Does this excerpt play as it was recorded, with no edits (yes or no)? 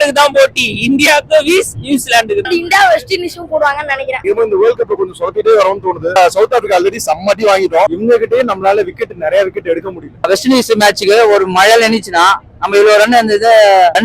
no